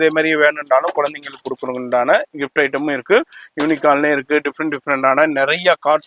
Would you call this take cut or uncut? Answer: uncut